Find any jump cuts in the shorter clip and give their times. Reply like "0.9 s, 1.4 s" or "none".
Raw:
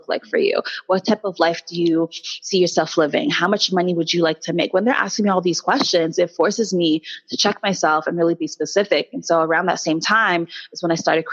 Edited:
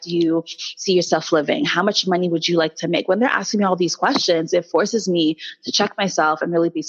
none